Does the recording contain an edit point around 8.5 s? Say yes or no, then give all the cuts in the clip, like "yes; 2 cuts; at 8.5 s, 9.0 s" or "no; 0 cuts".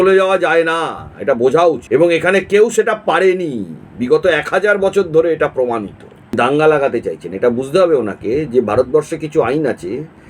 no; 2 cuts; at 1.8 s, 6.3 s